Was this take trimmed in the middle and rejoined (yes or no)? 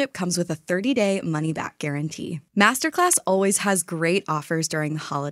no